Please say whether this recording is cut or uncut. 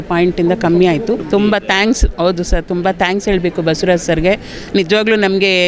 cut